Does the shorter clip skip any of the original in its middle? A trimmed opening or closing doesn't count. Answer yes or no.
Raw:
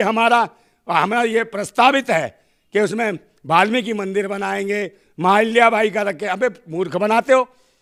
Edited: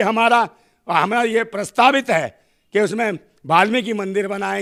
no